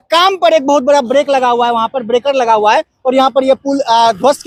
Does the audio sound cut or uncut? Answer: uncut